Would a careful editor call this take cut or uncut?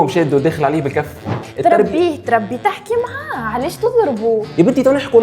cut